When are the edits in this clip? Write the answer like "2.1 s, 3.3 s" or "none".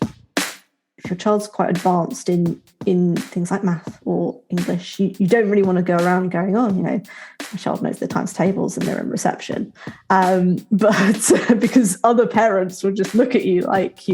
1.0 s